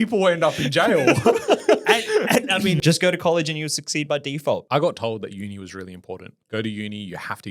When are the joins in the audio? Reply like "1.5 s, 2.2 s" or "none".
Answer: 2.8 s, 4.6 s, 6.3 s